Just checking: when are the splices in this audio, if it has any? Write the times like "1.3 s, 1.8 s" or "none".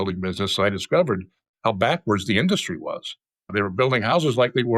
3.5 s